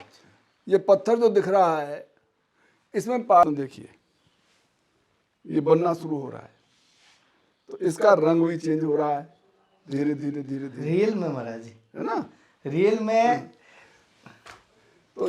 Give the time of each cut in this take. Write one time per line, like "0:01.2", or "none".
0:03.4